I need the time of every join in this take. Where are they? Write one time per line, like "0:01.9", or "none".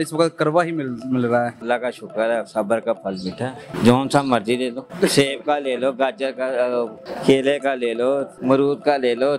0:01.6
0:03.6
0:04.8
0:07.0
0:08.3

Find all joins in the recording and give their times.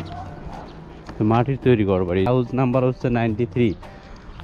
0:02.3

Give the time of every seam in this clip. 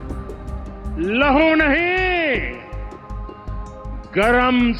0:02.6
0:04.1

